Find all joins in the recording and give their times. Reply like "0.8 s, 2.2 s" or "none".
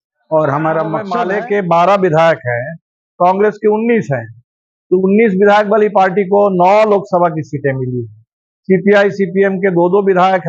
1.1 s